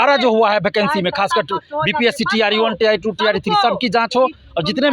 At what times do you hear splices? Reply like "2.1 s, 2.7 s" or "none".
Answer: none